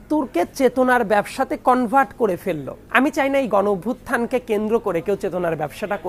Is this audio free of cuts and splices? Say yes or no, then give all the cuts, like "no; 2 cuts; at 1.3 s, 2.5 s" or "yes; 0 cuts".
no; 1 cut; at 2.7 s